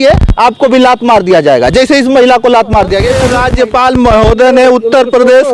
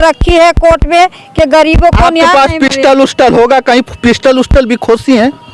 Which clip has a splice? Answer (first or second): first